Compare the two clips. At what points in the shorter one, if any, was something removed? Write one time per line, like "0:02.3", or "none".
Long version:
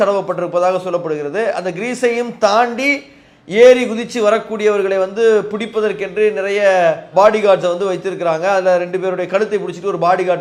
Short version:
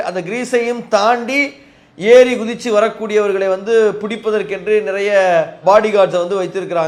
none